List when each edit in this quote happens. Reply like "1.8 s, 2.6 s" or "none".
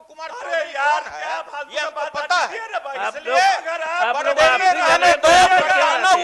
none